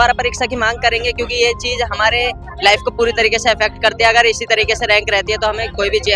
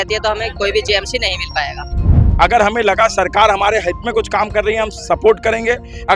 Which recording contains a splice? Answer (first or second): second